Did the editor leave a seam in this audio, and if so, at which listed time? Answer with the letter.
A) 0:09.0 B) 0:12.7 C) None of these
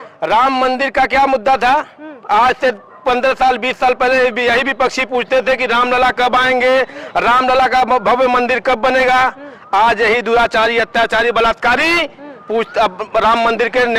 C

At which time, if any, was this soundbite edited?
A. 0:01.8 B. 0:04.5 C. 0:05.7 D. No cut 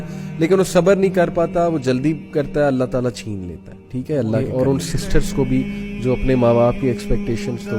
B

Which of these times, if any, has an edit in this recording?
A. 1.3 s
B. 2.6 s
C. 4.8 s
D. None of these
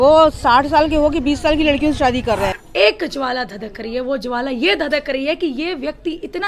B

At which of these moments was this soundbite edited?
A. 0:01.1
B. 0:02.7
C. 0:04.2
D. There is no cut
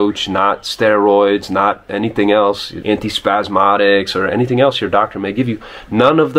B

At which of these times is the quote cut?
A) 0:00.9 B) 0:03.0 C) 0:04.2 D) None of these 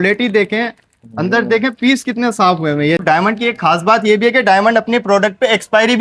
B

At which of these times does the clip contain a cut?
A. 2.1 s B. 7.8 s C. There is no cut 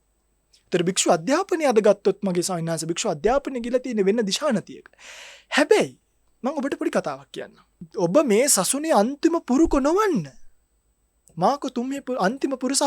B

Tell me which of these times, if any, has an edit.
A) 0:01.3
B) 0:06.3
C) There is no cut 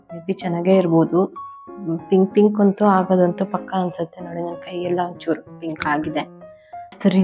B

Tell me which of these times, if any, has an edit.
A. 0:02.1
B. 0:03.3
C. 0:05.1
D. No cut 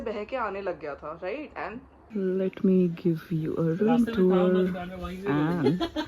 A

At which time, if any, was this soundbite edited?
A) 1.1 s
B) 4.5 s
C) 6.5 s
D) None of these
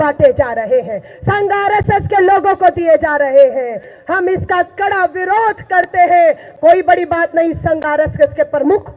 C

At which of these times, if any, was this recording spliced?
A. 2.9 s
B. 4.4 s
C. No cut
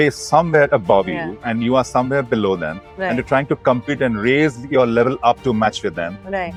C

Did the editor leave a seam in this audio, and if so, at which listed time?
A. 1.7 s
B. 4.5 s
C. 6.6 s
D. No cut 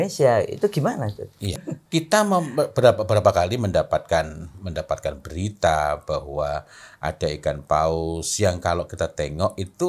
A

